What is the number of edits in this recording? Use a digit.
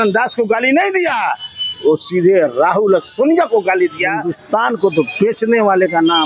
1